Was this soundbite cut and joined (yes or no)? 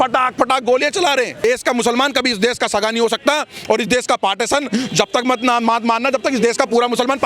yes